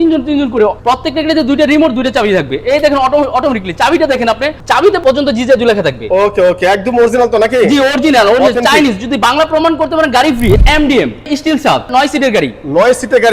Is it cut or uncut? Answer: cut